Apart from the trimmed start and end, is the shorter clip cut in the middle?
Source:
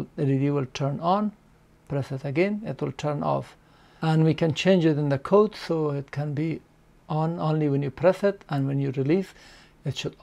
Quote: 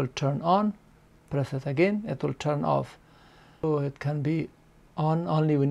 yes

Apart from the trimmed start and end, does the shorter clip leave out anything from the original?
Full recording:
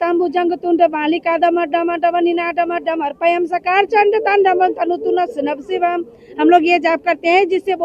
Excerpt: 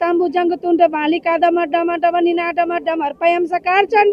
no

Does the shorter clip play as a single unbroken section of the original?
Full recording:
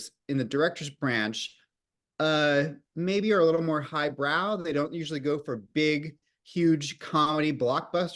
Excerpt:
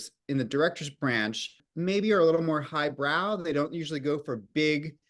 no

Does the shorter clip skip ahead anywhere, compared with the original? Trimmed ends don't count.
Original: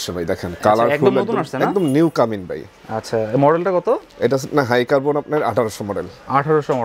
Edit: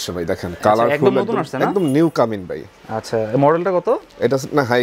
no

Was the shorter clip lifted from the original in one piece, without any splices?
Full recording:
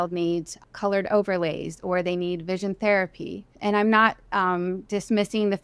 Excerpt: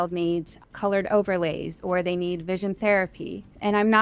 yes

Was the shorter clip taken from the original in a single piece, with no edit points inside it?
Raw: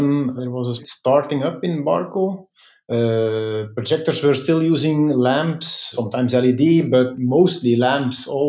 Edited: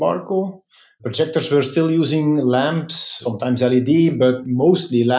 no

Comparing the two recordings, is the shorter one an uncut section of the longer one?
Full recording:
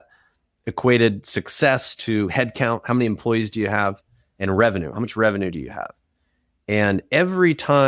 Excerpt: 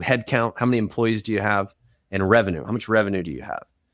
yes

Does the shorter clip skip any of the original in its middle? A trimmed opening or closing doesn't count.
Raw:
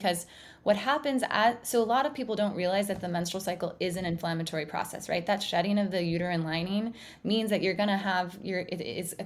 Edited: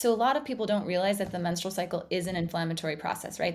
no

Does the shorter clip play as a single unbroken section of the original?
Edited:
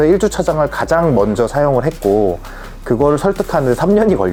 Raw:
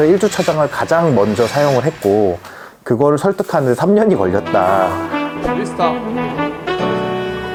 yes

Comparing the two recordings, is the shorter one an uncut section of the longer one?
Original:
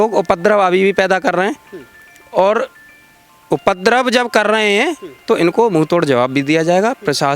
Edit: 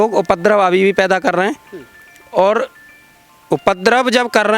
yes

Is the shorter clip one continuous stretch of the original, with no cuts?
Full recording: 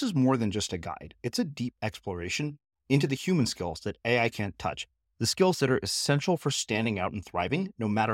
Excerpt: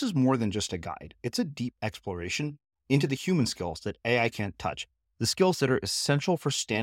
yes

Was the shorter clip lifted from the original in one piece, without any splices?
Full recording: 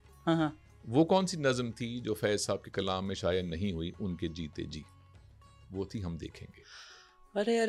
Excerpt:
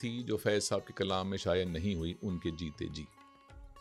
yes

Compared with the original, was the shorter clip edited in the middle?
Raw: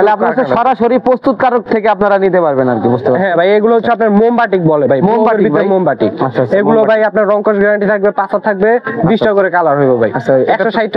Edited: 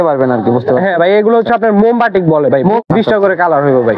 yes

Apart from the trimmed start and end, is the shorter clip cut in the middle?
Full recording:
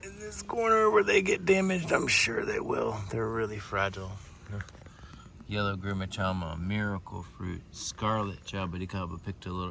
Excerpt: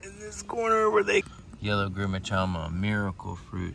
yes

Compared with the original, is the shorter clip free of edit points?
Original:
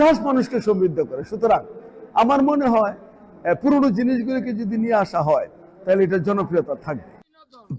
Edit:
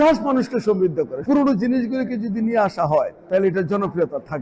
no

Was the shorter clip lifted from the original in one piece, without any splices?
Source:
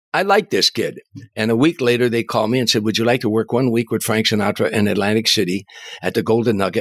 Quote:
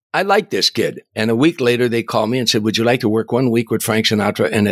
no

